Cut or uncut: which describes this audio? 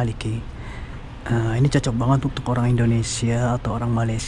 uncut